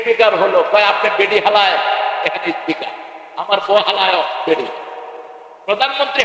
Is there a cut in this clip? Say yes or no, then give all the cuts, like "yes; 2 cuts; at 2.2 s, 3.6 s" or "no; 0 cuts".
no; 0 cuts